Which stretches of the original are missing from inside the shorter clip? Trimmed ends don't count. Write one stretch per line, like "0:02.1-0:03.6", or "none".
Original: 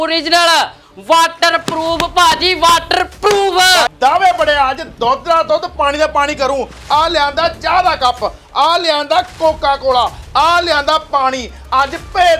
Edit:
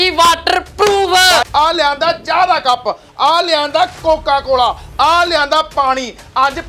0:03.9-0:06.8